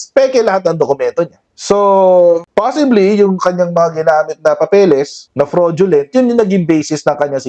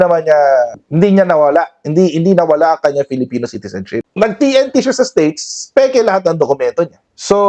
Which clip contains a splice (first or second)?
second